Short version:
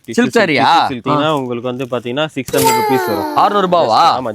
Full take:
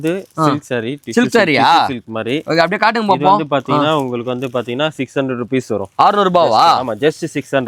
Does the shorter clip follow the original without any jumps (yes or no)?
no